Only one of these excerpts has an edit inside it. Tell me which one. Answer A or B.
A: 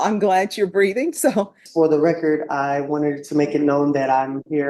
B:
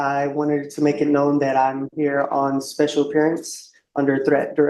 A